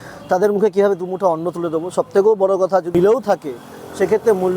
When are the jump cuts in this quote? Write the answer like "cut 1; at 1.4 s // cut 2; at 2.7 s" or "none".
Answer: cut 1; at 2.9 s